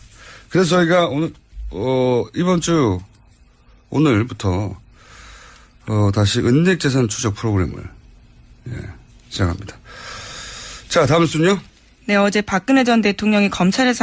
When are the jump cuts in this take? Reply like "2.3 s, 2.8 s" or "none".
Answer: none